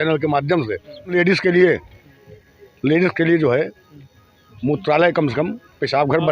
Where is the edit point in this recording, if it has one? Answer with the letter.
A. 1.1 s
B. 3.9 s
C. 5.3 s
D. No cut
A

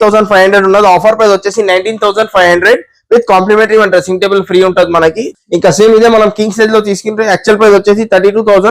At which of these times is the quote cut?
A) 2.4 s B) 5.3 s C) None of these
B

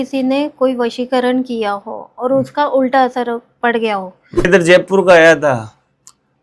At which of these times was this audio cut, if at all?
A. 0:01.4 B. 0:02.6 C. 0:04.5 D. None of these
C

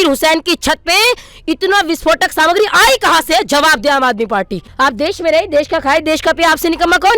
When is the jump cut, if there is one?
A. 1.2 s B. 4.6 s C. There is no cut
B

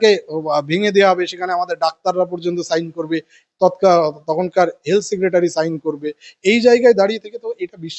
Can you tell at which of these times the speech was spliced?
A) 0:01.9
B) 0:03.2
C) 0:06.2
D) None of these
D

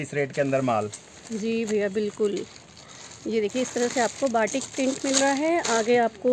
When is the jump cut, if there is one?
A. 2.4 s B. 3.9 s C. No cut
C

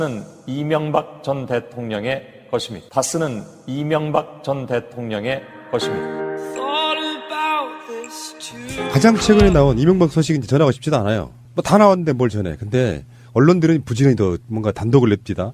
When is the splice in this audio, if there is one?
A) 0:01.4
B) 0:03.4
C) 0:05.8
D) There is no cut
C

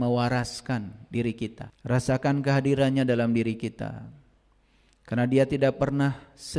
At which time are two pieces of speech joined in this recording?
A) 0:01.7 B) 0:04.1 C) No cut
A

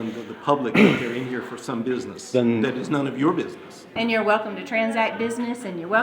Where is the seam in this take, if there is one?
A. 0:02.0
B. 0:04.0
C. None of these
B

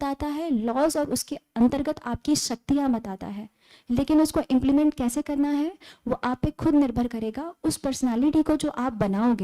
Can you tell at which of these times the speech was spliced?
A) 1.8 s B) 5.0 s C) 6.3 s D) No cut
D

